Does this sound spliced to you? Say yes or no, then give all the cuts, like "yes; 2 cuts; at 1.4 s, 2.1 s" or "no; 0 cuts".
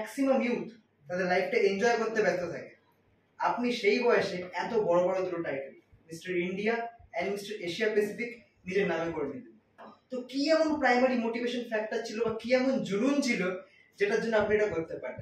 no; 0 cuts